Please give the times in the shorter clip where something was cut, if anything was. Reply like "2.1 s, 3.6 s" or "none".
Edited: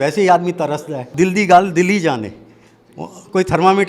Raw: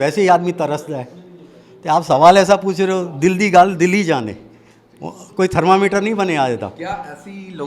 1.1 s